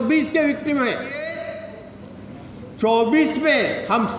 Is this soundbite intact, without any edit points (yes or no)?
no